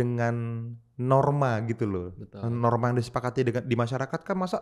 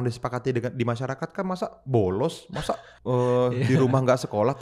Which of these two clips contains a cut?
second; 1 cut; at 2.9 s

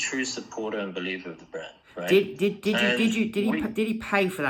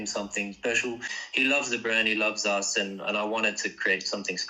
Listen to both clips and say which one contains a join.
second; 1 cut; at 1.2 s

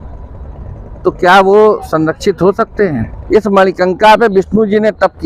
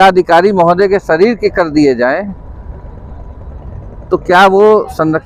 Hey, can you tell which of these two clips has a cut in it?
first; 1 cut; at 3.1 s

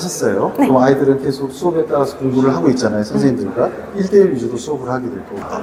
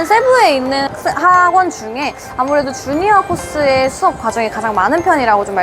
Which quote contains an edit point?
second; 1 cut; at 0.9 s

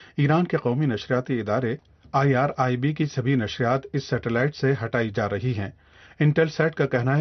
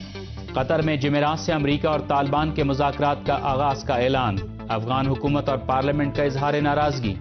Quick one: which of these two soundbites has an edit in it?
second; 1 cut; at 4.1 s

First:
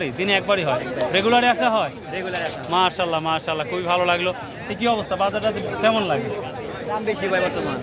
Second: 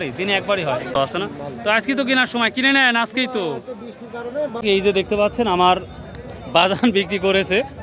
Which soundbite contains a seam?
second; 2 cuts; at 1.0 s, 4.6 s

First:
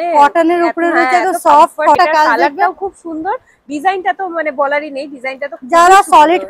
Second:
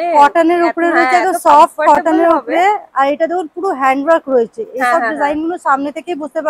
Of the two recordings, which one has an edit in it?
first; 1 cut; at 2.0 s

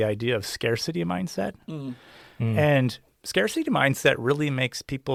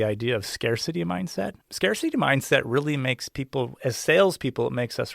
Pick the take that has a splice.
second; 1 cut; at 1.6 s

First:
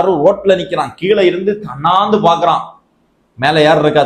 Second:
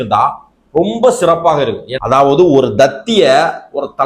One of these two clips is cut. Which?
second; 1 cut; at 1.9 s

